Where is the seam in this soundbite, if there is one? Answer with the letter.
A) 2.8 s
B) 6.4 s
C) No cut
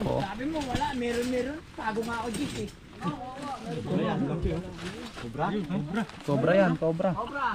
C